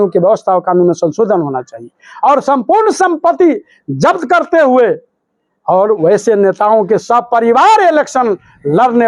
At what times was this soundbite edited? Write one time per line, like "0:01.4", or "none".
none